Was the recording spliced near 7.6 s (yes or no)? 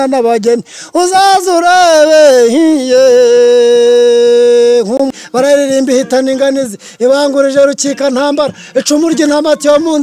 no